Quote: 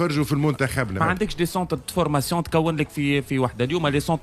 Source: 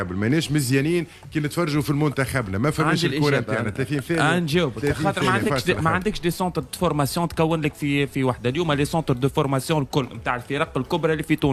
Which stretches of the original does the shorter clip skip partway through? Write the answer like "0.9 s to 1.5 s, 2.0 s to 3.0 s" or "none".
2.5 s to 5.8 s